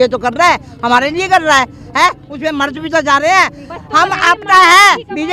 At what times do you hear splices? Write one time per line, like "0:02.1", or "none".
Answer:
none